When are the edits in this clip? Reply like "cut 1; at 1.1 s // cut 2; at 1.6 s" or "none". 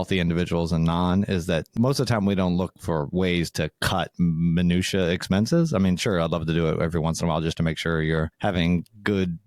cut 1; at 4.1 s